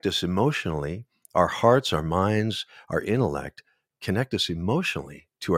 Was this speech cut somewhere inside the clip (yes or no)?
no